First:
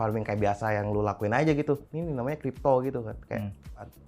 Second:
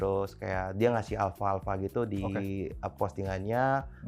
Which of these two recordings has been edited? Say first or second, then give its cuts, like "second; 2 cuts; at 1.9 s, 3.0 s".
first; 1 cut; at 1.9 s